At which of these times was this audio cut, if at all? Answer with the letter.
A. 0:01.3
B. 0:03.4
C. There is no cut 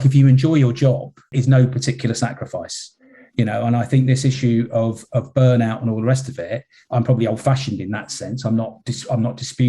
A